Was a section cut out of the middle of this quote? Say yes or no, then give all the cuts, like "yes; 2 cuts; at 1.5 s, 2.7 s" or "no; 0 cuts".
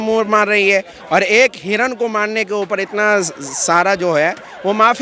no; 0 cuts